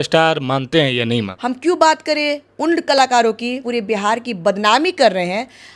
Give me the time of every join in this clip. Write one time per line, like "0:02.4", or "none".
0:01.3
0:03.6